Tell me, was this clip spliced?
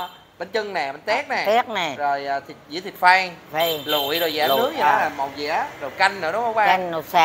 no; 0 cuts

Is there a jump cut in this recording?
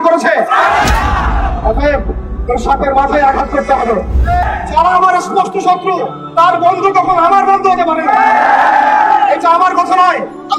yes; 1 cut; at 4.4 s

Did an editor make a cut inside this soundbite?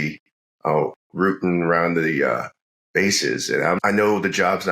yes; 1 cut; at 3.8 s

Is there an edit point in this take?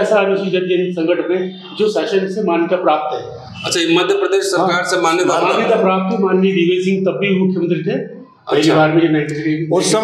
no; 0 cuts

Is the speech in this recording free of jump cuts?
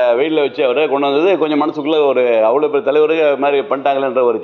yes; 0 cuts

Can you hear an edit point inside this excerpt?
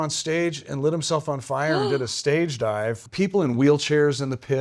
yes; 1 cut; at 3.0 s

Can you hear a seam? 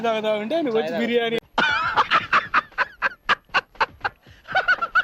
no; 0 cuts

